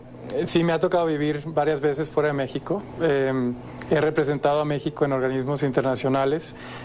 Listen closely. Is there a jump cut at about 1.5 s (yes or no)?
yes